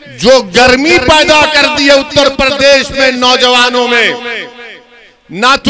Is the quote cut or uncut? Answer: uncut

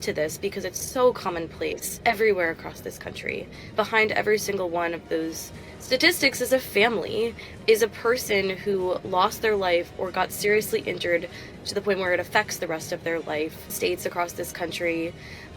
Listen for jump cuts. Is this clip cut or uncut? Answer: cut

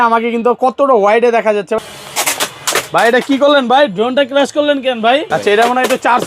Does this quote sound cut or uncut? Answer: cut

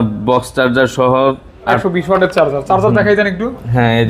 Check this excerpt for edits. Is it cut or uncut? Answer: cut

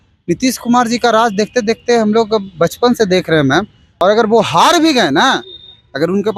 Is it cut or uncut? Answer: cut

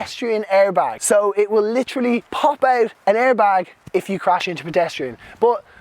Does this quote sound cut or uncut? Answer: cut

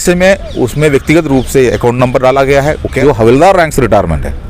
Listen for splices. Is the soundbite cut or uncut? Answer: cut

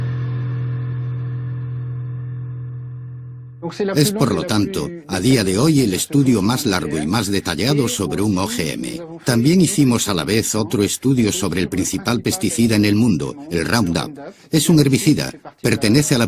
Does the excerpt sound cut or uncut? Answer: uncut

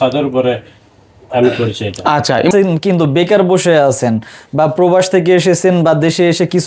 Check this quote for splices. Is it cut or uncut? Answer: cut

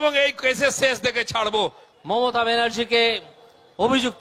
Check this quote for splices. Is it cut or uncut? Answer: cut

